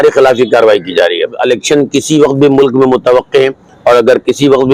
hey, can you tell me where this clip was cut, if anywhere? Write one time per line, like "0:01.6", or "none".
0:01.4